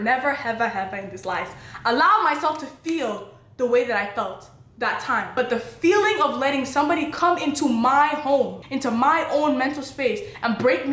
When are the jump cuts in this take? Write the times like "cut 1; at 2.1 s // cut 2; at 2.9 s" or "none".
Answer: cut 1; at 5.3 s